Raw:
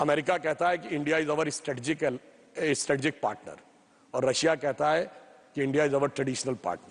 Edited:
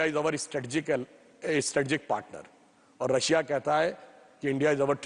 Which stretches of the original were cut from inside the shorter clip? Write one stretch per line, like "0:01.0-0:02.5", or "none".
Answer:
none

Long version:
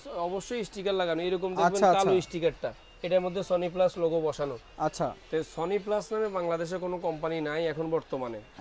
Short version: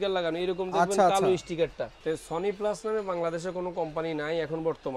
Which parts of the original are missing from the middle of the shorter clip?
0:02.8-0:05.2

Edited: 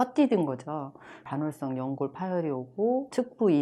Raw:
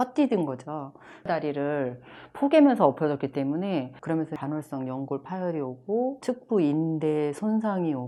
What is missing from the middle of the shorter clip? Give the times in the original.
0:01.2-0:04.3

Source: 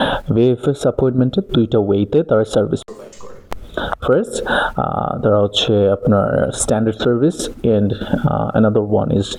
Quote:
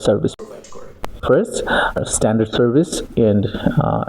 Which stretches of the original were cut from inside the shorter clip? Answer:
0:03.6-0:03.9
0:04.8-0:06.5

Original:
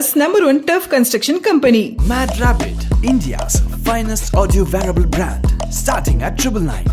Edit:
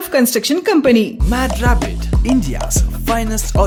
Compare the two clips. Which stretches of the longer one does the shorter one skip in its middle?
none

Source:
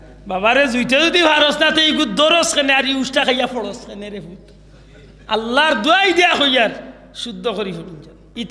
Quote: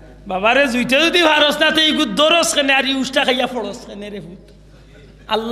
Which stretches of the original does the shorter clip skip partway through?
none

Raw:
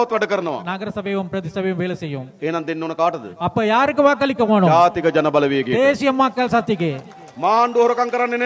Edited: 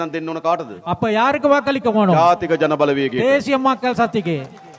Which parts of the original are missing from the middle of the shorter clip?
none

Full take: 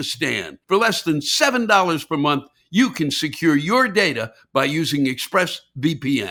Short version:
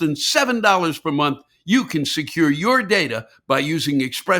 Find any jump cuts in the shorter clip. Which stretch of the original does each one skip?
none

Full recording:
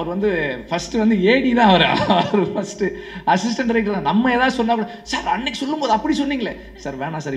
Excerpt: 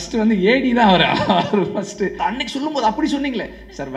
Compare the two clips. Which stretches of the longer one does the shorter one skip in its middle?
0:03.0-0:05.2

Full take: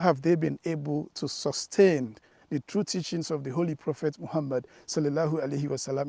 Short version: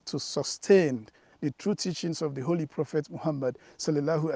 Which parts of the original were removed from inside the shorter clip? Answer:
none

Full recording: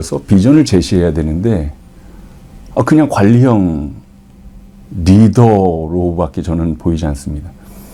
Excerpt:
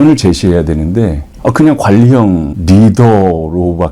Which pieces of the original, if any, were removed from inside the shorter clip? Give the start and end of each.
0:01.7-0:02.6
0:03.8-0:04.9

